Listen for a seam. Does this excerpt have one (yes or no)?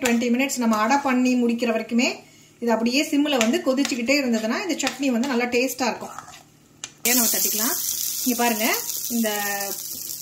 yes